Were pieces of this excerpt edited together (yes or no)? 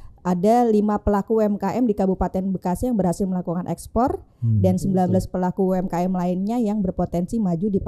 no